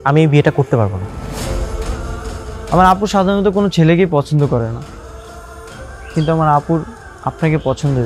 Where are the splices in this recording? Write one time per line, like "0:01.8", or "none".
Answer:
0:01.0
0:02.7